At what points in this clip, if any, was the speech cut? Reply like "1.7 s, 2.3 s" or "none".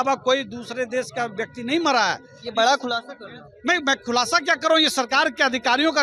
none